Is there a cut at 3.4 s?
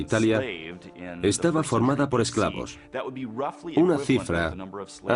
yes; 1 cut; at 3.4 s

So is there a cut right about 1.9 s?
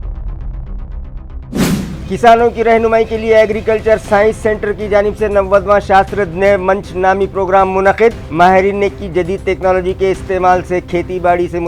yes; 1 cut; at 1.9 s

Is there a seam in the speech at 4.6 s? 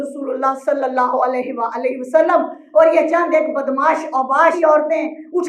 yes; 2 cuts; at 2.6 s, 4.6 s

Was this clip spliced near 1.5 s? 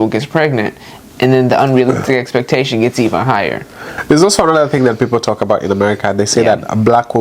no; 1 cut; at 3.9 s

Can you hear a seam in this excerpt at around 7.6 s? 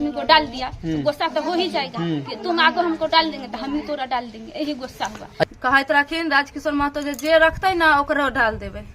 no; 1 cut; at 5.5 s

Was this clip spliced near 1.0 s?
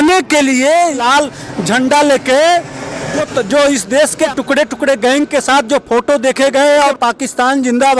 yes; 1 cut; at 1.0 s

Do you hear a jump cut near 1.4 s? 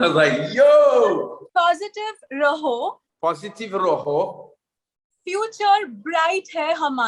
yes; 2 cuts; at 1.4 s, 3.1 s

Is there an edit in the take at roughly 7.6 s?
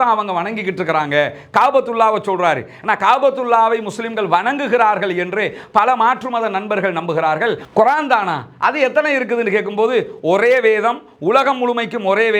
yes; 1 cut; at 7.6 s

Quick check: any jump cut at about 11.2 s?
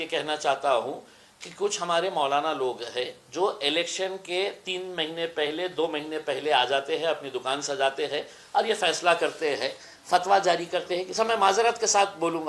yes; 1 cut; at 11.2 s

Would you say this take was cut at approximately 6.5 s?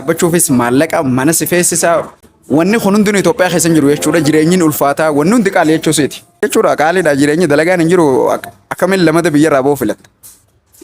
yes; 1 cut; at 6.5 s

